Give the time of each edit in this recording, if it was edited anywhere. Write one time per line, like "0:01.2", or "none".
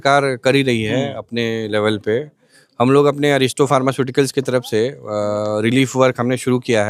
none